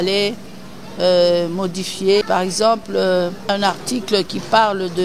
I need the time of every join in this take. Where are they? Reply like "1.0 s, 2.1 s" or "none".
2.2 s, 3.5 s